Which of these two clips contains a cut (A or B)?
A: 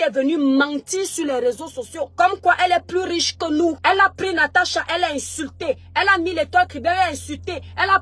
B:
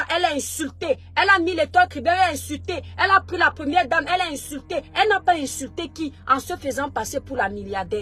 A